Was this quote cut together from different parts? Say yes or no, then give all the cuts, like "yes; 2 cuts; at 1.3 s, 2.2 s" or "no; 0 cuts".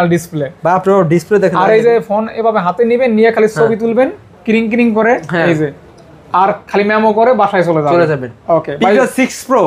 no; 0 cuts